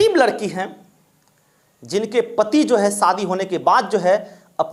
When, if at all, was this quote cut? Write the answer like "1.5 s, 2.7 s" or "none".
none